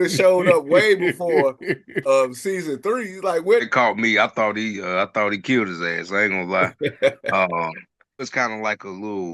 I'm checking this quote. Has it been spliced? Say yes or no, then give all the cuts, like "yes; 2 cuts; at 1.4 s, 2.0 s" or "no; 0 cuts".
yes; 2 cuts; at 3.6 s, 8.3 s